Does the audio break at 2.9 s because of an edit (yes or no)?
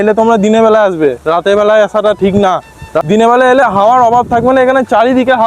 yes